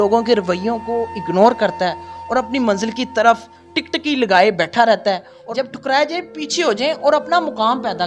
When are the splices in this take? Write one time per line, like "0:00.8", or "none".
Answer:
0:05.3